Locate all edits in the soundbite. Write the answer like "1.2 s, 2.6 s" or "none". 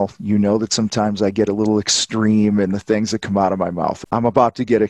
4.0 s